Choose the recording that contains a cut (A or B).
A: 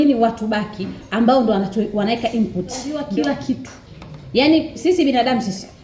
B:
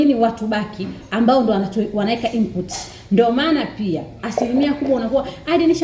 A